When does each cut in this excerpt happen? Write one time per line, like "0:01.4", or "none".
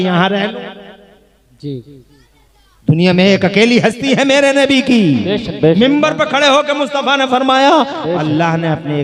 none